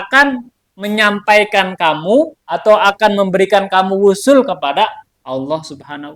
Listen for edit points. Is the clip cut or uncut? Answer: uncut